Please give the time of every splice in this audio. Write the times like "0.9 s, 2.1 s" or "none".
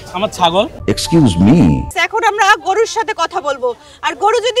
1.9 s

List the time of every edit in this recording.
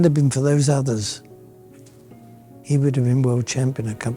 none

